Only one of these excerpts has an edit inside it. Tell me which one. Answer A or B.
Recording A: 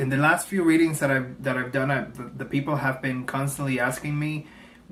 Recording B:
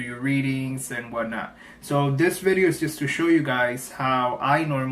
B